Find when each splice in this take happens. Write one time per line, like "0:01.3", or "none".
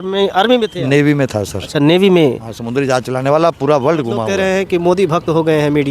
0:04.3